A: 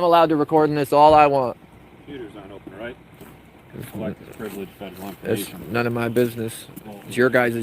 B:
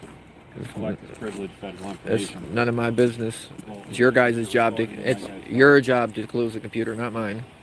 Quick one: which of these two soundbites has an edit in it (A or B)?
A